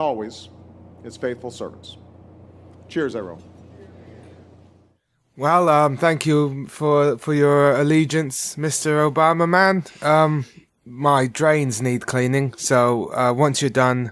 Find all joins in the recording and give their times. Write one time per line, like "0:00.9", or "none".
0:06.2